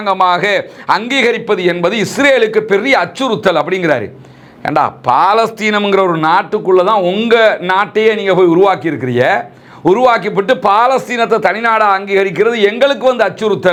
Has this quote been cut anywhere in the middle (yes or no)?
no